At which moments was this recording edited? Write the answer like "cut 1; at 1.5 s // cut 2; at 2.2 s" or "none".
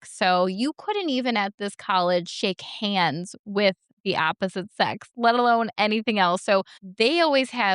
cut 1; at 6.8 s